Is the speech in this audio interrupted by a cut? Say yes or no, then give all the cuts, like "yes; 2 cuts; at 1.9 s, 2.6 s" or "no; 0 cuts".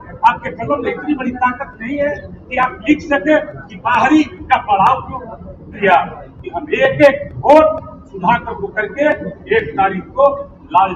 yes; 1 cut; at 5.8 s